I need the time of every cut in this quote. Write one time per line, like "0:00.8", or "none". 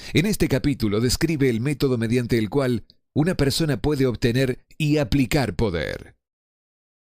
0:05.4